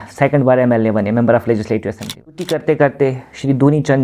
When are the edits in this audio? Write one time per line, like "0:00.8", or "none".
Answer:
0:02.4